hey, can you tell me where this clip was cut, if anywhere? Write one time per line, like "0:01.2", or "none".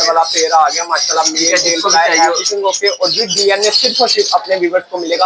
none